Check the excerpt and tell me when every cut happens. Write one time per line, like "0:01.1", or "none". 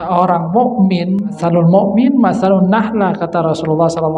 0:01.3